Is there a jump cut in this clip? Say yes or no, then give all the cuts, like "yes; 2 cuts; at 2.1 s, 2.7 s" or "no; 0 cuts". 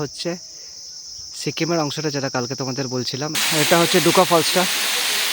yes; 1 cut; at 3.4 s